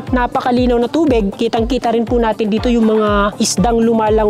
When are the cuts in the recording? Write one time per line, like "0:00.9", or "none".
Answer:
none

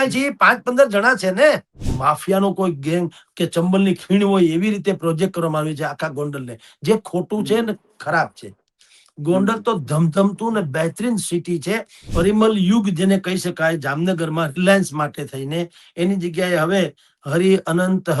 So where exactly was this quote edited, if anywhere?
0:01.9
0:12.0

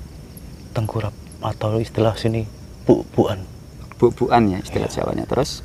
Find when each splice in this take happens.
none

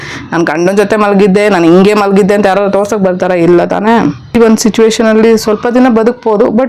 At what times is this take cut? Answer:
0:04.2

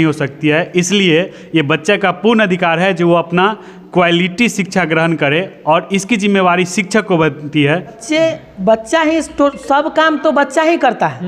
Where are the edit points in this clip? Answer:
0:08.0

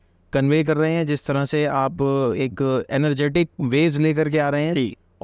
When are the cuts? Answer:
none

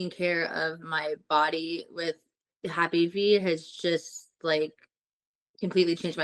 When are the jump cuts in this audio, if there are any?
none

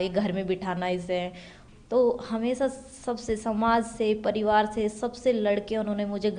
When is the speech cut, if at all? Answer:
none

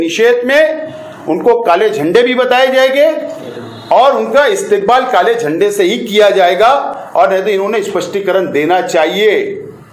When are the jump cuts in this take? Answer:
none

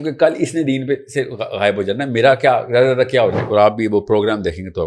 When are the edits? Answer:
0:03.4

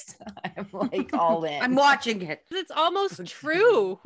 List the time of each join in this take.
0:02.6

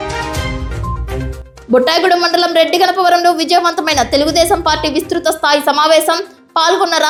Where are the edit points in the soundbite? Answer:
none

